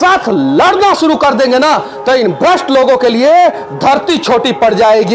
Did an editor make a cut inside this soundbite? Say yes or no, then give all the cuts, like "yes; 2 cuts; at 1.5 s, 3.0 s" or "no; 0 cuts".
no; 0 cuts